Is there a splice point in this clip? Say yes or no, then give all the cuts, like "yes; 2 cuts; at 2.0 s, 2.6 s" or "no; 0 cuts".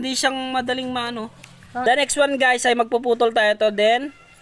yes; 1 cut; at 1.8 s